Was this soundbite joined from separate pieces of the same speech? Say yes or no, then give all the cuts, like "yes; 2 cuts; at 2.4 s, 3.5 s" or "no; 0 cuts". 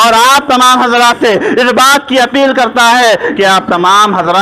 no; 0 cuts